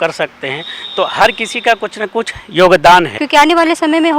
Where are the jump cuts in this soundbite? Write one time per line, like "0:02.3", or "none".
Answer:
0:03.2